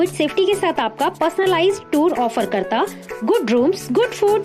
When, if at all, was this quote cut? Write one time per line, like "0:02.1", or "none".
none